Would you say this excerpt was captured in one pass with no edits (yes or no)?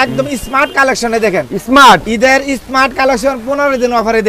yes